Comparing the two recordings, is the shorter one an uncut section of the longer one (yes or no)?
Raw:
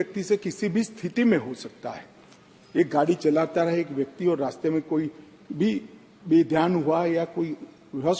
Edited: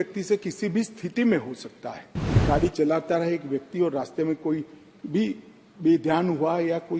no